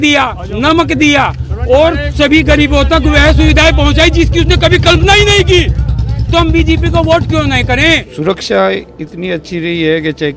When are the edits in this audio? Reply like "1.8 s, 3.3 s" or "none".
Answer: 8.1 s